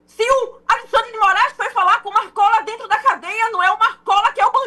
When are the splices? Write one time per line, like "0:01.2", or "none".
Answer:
none